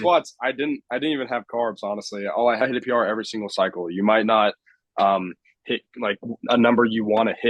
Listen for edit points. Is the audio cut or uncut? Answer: cut